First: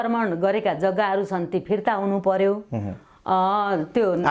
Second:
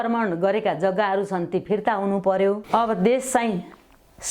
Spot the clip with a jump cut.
second; 1 cut; at 2.6 s

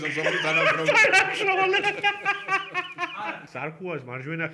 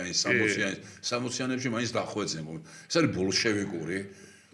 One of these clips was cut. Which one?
first; 1 cut; at 3.5 s

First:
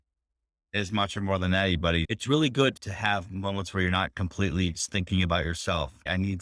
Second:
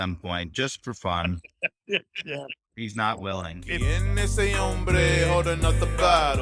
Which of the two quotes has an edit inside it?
second; 1 cut; at 3.7 s

